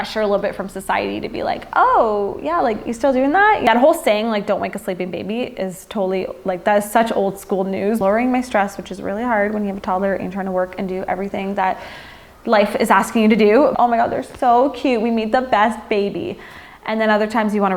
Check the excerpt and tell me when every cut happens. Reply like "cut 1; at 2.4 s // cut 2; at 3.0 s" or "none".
cut 1; at 3.6 s // cut 2; at 8.0 s // cut 3; at 13.7 s